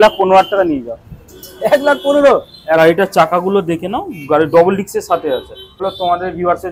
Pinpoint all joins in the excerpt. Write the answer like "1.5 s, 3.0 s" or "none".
2.8 s, 5.8 s